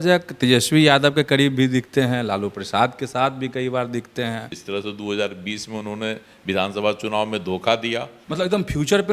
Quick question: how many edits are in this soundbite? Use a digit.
2